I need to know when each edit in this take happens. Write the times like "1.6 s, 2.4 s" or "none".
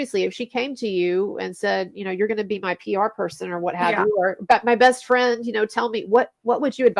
none